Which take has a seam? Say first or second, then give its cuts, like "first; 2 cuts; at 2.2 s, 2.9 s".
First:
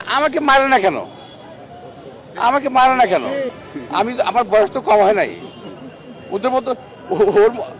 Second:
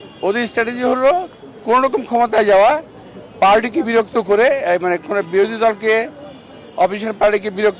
first; 1 cut; at 3.6 s